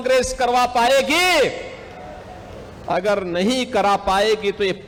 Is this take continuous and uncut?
yes; 0 cuts

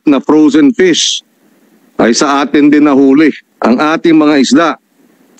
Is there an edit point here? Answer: yes; 1 cut; at 3.5 s

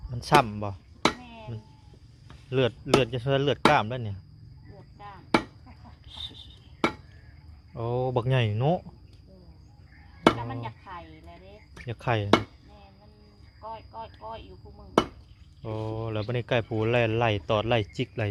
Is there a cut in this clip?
no; 0 cuts

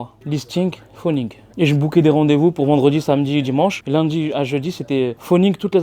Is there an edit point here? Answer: no; 0 cuts

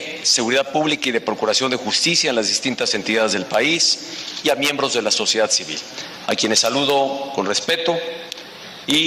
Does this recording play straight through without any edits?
no; 1 cut; at 3.1 s

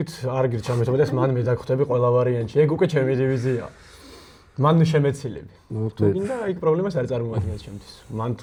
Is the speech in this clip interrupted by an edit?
no; 0 cuts

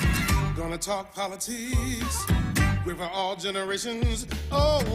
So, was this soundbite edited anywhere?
no; 0 cuts

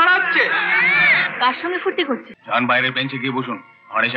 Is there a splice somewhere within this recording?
yes; 1 cut; at 2.3 s

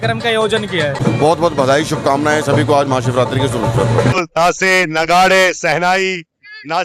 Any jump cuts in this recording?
yes; 2 cuts; at 1.0 s, 4.2 s

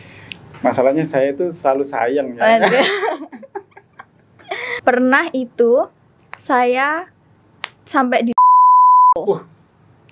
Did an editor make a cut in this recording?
yes; 1 cut; at 4.7 s

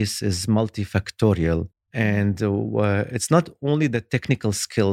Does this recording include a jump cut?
no; 0 cuts

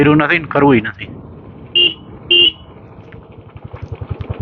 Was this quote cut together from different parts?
no; 0 cuts

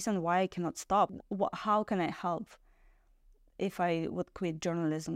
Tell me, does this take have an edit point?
yes; 1 cut; at 1.1 s

